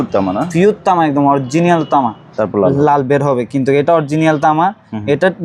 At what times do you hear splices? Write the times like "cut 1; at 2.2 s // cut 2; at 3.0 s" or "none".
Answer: cut 1; at 2.2 s